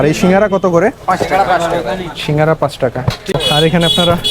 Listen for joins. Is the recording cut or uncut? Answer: cut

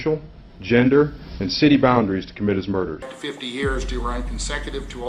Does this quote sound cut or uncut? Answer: cut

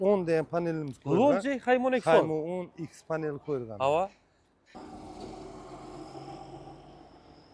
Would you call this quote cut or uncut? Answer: uncut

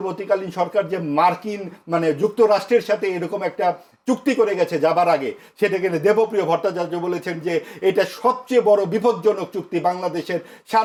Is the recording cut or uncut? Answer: uncut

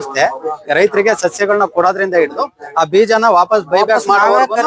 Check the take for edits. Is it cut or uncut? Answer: uncut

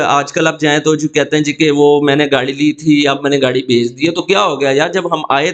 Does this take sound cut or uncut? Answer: uncut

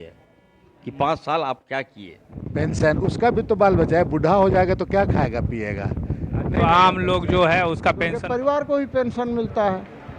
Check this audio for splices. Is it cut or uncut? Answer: cut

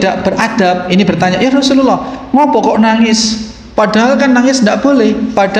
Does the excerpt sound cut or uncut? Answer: uncut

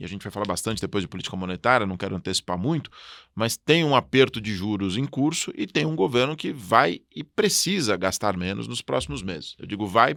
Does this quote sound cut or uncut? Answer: uncut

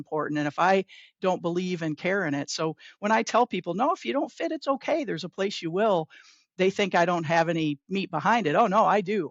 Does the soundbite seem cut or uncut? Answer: uncut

